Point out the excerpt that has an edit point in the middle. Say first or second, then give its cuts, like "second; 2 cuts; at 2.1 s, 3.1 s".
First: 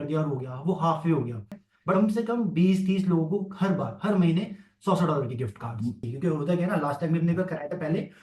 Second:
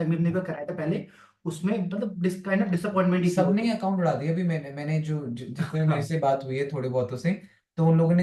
first; 2 cuts; at 1.9 s, 6.1 s